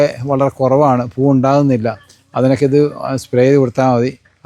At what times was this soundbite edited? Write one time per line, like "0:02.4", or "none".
none